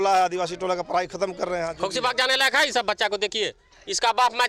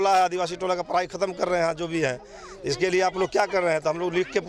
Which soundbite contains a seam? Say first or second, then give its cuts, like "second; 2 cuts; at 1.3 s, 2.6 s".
first; 1 cut; at 1.7 s